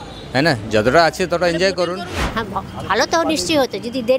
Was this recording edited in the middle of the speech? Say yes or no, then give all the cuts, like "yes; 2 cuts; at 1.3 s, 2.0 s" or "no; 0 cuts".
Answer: yes; 1 cut; at 2.2 s